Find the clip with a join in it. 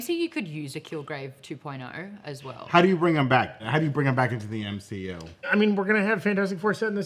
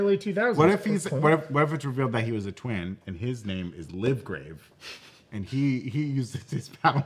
first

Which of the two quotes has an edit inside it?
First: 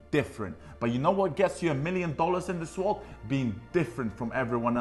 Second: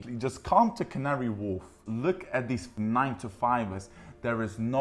second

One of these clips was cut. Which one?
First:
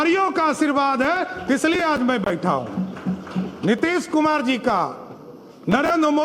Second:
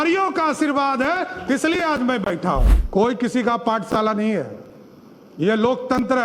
second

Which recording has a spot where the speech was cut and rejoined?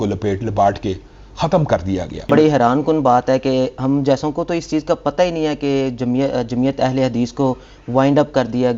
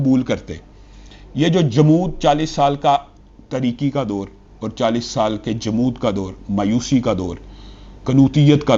first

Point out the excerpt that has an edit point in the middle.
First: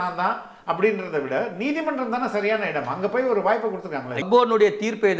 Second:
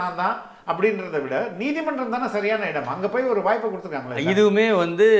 first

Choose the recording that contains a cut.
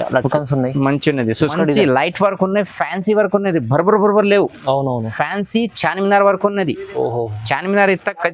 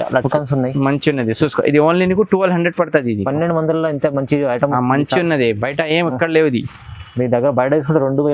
first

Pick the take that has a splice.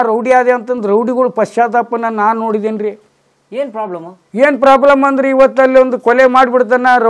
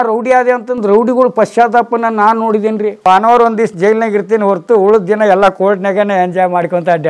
second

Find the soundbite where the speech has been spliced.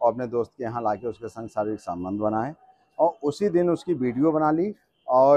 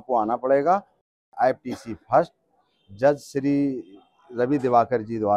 second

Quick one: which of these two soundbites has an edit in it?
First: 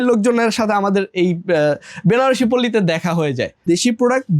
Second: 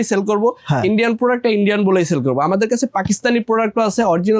first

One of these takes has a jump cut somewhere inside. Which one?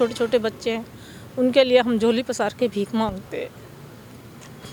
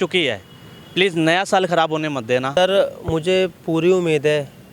second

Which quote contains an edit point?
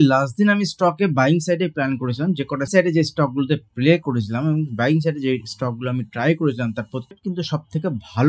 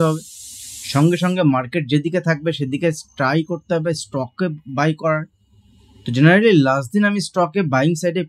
first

